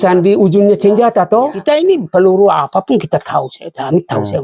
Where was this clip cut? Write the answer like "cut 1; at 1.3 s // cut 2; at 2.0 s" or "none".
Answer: cut 1; at 1.6 s